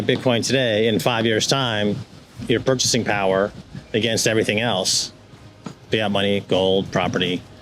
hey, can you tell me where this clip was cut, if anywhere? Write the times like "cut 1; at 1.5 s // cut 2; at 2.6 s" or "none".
none